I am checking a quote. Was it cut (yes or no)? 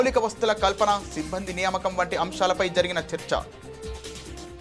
yes